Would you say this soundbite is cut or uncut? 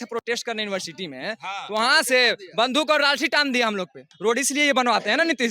cut